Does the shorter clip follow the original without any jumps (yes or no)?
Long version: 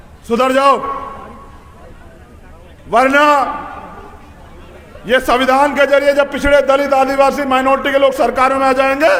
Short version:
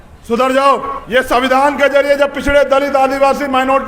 no